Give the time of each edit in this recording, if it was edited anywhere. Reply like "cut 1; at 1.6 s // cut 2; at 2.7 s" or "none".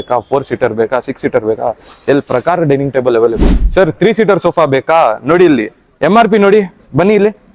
cut 1; at 3.6 s